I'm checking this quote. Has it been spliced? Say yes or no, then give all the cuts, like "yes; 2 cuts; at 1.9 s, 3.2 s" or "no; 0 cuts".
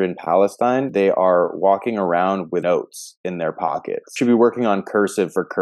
yes; 3 cuts; at 0.9 s, 2.6 s, 4.1 s